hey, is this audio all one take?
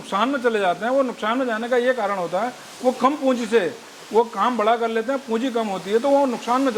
yes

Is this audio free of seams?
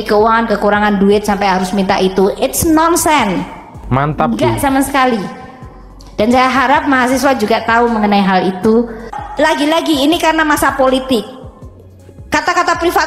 no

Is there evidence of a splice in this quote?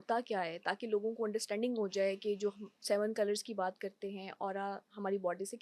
no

